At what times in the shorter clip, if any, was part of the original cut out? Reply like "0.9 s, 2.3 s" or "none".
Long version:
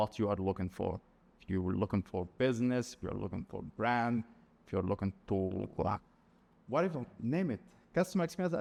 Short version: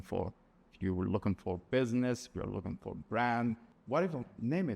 3.7 s